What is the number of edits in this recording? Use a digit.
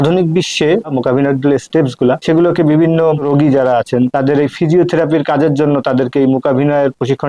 4